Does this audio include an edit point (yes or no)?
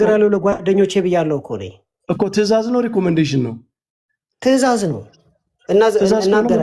no